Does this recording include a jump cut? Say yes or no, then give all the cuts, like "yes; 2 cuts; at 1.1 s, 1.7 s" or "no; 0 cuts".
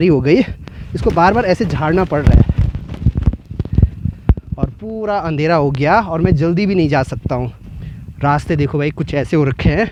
no; 0 cuts